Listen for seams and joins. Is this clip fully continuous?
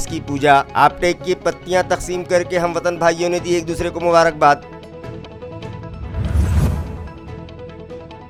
yes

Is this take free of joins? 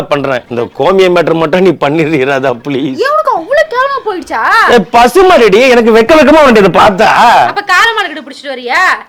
yes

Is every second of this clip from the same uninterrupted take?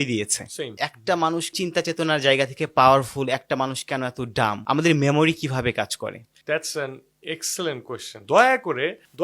no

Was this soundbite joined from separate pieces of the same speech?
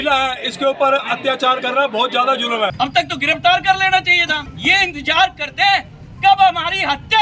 yes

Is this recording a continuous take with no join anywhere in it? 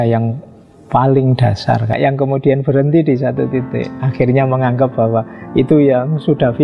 no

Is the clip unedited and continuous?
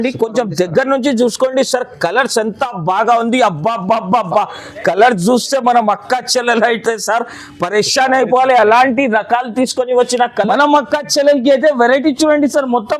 no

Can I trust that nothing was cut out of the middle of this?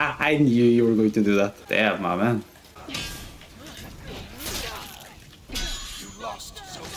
yes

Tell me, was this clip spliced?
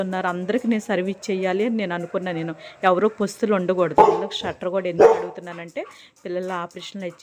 yes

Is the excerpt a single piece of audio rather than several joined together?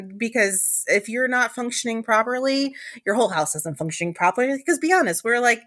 yes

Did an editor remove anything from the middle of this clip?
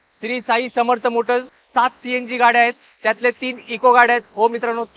yes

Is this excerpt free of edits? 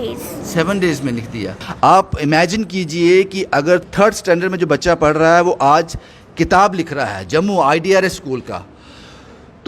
no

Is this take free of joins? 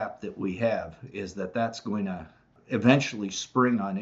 no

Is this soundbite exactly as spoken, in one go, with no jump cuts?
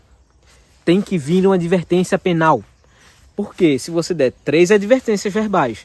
yes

